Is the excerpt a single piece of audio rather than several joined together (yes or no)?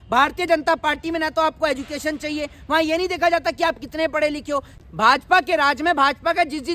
no